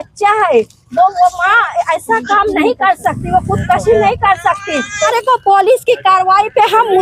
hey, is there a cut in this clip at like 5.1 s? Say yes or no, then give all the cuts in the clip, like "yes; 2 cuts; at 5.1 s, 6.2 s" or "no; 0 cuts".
yes; 1 cut; at 5.1 s